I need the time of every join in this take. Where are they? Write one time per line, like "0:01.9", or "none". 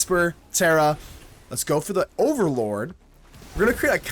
none